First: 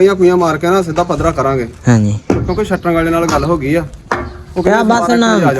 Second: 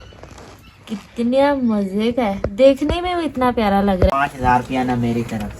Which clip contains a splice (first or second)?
second